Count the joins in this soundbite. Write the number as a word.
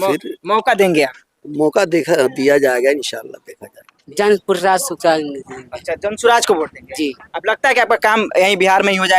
one